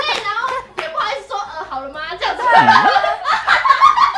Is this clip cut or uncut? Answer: uncut